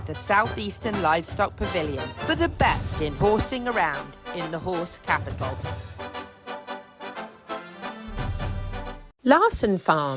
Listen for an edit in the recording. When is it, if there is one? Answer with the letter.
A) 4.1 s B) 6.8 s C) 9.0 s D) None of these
C